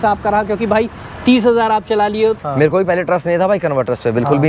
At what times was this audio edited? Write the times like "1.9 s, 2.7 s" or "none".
2.4 s